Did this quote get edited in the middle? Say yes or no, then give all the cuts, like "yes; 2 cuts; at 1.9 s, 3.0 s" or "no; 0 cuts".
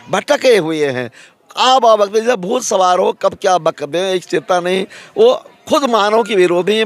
no; 0 cuts